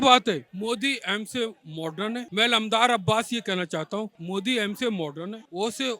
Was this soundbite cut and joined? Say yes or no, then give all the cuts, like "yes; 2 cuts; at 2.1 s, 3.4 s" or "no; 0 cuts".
no; 0 cuts